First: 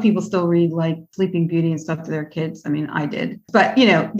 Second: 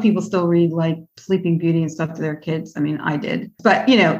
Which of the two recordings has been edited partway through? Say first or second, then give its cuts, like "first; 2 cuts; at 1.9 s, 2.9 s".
first; 1 cut; at 1.0 s